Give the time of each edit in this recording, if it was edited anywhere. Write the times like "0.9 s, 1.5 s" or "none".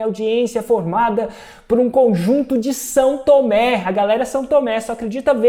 none